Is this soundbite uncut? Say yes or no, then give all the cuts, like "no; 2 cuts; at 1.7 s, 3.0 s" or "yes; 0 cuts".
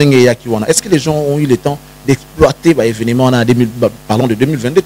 yes; 0 cuts